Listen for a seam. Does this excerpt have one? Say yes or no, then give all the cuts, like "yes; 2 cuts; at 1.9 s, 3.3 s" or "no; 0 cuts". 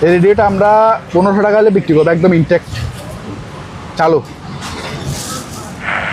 no; 0 cuts